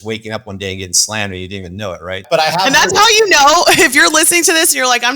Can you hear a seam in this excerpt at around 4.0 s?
no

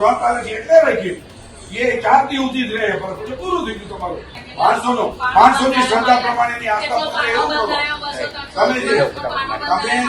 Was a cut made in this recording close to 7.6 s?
no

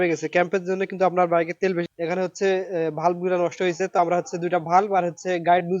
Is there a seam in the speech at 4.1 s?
no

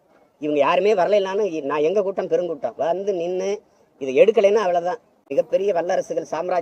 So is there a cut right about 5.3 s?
yes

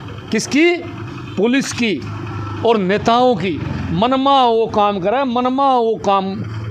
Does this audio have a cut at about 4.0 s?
no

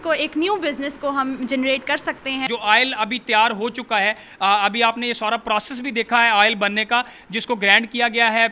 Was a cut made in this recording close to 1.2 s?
no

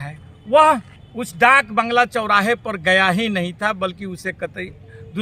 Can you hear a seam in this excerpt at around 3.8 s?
no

